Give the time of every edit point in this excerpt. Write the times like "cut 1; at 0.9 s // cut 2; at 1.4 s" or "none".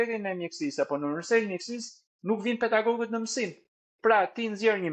none